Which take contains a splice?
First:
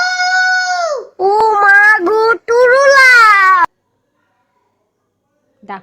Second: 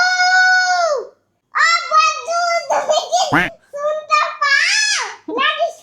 second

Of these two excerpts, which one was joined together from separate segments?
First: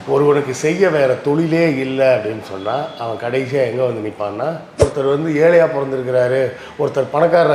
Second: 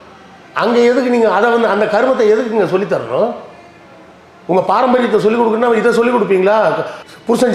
first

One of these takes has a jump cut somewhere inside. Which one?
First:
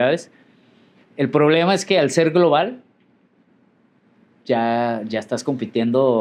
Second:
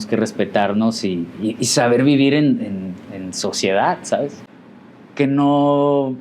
second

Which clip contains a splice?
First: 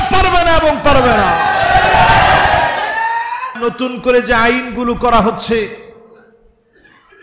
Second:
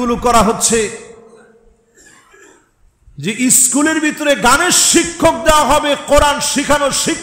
first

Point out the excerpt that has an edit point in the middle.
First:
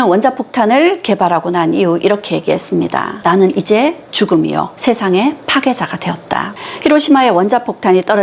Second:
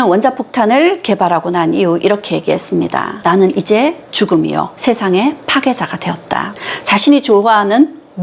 first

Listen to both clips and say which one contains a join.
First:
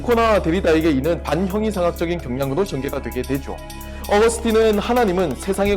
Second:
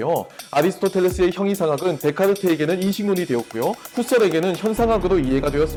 first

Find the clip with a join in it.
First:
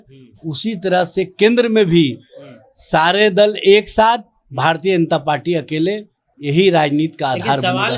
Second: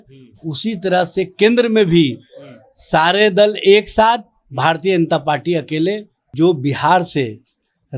second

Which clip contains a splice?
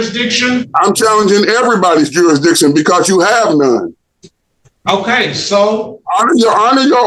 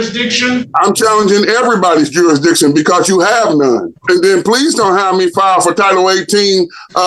second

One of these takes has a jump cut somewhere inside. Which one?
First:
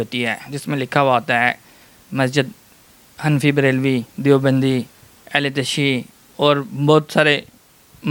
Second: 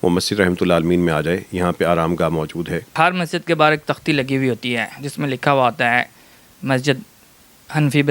second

